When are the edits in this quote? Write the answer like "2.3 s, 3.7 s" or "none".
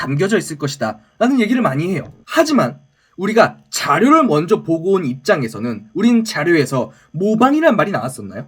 2.1 s